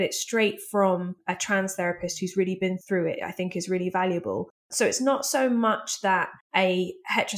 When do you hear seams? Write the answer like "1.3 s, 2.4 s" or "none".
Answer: 1.2 s, 2.8 s, 4.7 s, 6.4 s